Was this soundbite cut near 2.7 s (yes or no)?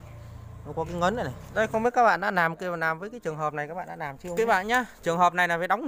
no